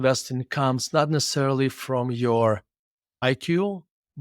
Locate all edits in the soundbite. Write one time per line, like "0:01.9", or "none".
0:03.2